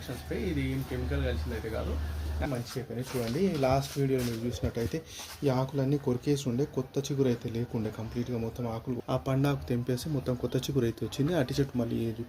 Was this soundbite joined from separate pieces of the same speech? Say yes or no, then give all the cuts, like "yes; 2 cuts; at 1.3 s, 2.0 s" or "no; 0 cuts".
yes; 2 cuts; at 2.5 s, 9.0 s